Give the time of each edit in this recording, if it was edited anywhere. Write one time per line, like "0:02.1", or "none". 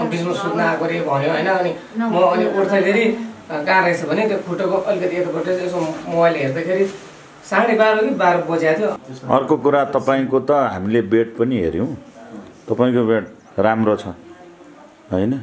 0:09.1